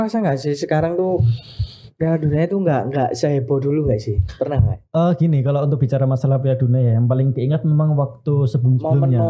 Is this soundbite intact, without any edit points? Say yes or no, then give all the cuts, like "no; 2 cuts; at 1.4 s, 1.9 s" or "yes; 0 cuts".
yes; 0 cuts